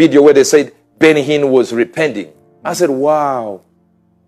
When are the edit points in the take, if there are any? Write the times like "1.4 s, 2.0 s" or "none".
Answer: none

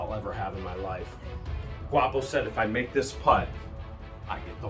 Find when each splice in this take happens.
none

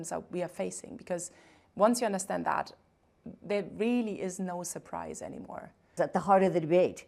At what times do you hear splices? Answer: 5.9 s

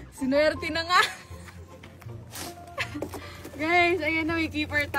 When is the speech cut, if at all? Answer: none

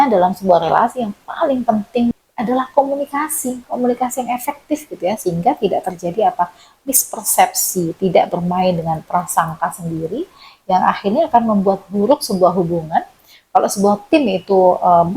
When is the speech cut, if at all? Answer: 2.1 s

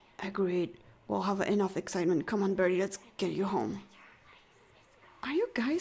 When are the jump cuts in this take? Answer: none

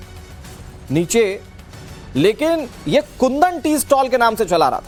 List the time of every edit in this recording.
none

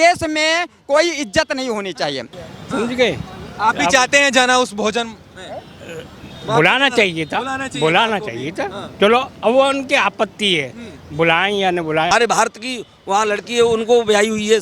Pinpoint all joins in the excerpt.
2.3 s, 12.1 s

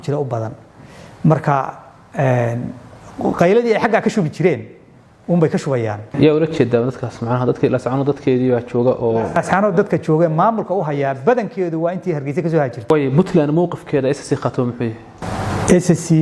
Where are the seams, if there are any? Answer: 6.1 s, 12.8 s, 15.1 s

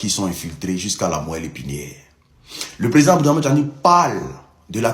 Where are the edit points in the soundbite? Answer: none

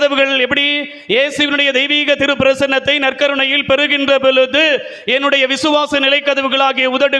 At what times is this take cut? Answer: none

